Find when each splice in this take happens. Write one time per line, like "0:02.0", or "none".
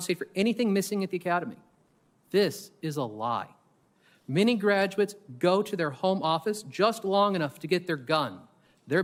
none